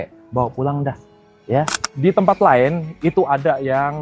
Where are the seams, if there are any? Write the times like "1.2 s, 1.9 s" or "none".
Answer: 1.8 s